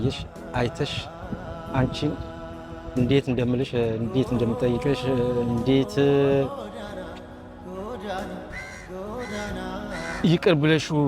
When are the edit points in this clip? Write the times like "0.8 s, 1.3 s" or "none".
6.5 s, 8.5 s, 10.1 s